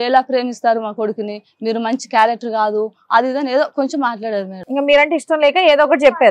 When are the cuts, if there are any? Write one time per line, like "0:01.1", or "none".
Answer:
none